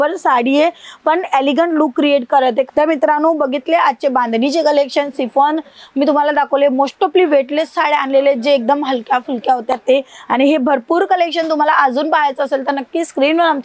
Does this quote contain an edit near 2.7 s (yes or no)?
yes